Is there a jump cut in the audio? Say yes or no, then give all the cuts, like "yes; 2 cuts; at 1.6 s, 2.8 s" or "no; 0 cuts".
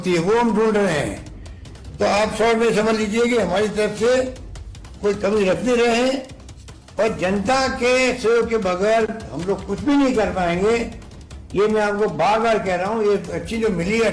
no; 0 cuts